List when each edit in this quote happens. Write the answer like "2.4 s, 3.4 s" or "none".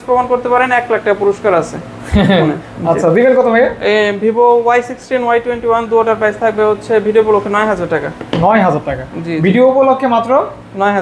none